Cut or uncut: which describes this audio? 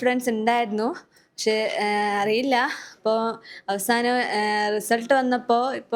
uncut